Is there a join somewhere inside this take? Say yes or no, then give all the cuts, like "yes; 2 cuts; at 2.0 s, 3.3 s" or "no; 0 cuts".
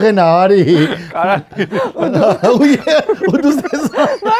no; 0 cuts